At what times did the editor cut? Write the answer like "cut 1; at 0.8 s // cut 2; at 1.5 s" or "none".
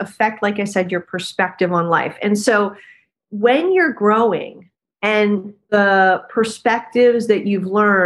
cut 1; at 5.7 s